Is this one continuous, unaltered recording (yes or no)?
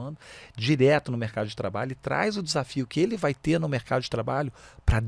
yes